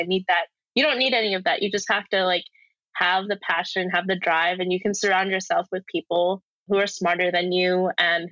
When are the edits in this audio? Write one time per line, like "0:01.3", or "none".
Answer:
0:06.7